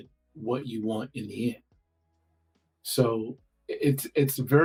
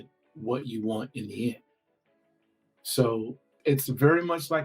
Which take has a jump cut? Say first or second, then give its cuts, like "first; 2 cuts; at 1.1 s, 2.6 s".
second; 1 cut; at 3.5 s